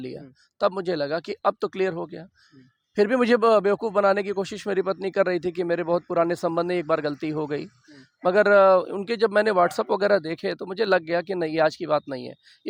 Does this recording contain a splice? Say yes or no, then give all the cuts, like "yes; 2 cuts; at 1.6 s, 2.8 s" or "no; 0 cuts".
no; 0 cuts